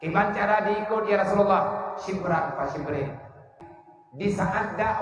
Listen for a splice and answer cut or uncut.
cut